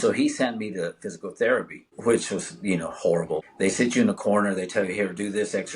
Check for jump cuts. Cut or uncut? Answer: cut